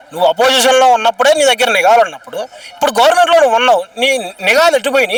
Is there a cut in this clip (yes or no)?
no